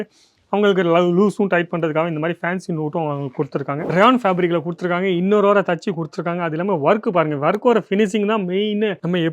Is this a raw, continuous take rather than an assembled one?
no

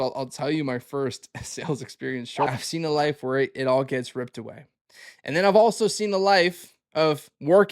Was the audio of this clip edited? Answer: yes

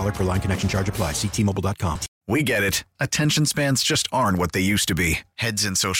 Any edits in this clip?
yes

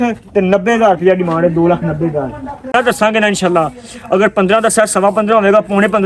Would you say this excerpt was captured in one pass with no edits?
no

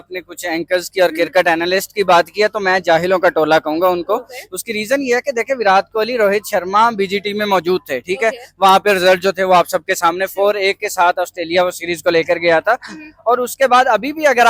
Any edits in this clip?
no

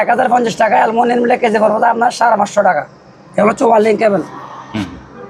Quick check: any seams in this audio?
no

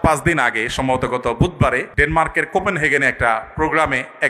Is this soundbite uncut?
no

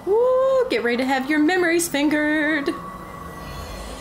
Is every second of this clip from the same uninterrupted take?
yes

